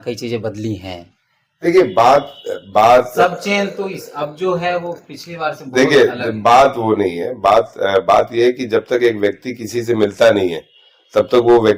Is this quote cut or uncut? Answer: uncut